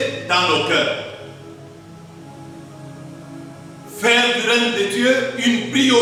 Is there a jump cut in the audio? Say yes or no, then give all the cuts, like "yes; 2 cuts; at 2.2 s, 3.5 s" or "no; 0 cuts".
no; 0 cuts